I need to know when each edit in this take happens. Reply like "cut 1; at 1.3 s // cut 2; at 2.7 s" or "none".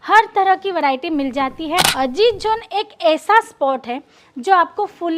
cut 1; at 1.9 s